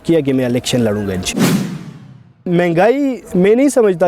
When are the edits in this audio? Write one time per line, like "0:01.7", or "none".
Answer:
0:01.3
0:02.5